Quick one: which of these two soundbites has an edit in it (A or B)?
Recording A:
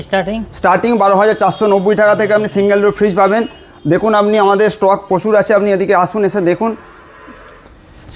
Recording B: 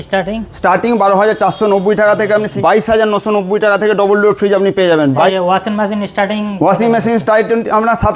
B